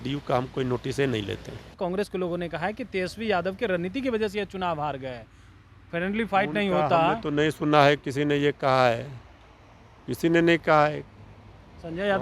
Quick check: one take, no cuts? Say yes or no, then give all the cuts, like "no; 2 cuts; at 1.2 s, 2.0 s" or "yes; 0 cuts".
no; 1 cut; at 1.8 s